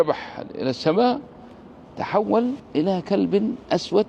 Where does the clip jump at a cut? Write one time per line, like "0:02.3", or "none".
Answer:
0:02.6